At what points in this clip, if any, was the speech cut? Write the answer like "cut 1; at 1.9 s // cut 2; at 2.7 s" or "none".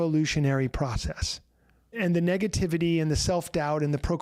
cut 1; at 1.9 s